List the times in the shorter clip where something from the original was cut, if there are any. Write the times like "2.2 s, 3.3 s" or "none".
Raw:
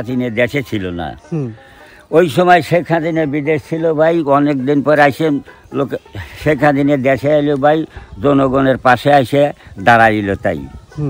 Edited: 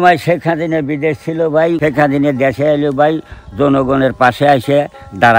1.8 s